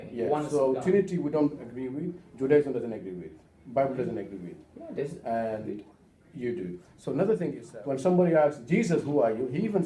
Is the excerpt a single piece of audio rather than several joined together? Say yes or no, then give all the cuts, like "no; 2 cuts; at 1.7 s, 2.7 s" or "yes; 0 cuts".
no; 1 cut; at 7.7 s